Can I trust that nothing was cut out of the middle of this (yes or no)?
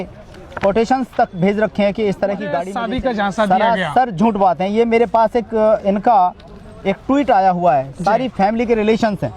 no